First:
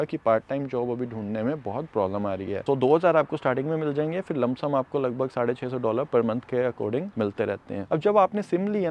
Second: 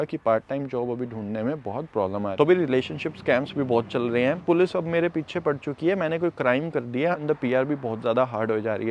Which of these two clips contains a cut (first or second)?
second